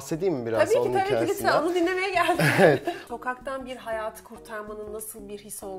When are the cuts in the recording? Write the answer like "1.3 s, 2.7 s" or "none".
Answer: 3.0 s